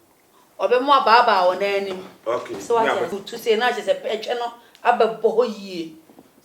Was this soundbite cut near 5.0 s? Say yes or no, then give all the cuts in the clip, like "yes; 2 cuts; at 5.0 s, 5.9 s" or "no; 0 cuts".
no; 1 cut; at 3.1 s